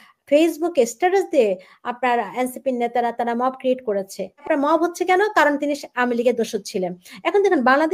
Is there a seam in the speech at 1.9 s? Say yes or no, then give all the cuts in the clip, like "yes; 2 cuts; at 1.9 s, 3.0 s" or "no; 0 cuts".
no; 1 cut; at 4.4 s